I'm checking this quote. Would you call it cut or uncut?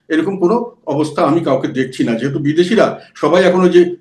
uncut